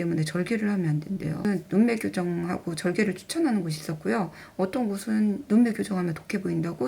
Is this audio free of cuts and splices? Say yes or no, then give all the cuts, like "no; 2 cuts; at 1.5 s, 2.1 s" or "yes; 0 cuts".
no; 1 cut; at 1.4 s